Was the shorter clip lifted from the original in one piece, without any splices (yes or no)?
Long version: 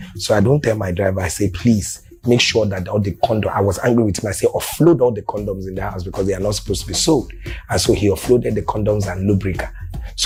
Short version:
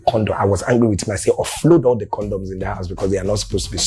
yes